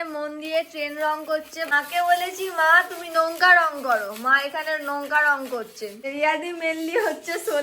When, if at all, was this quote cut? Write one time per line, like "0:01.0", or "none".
0:01.7
0:06.0